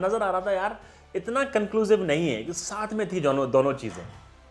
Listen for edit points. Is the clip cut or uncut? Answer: uncut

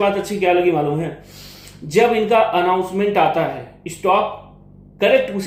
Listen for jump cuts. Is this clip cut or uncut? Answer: uncut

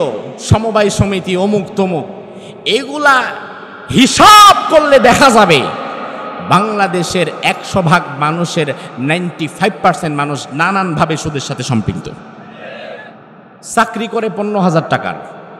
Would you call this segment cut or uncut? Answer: cut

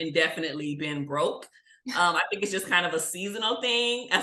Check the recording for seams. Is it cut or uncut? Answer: uncut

